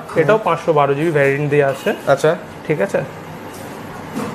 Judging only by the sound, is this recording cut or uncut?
uncut